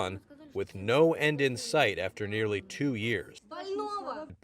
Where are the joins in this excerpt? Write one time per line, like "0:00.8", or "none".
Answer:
0:03.4